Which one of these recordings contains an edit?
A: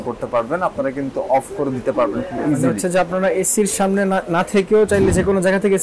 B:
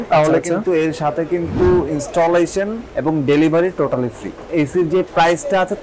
B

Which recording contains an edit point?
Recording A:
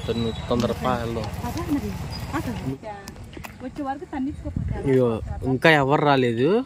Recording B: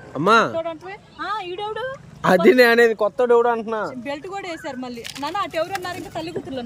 A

